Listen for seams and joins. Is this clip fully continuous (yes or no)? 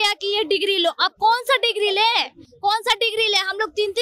yes